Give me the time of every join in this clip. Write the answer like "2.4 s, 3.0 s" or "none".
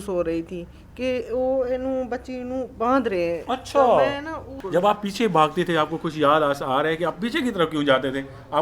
4.5 s